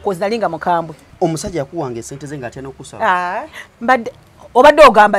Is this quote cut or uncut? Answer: cut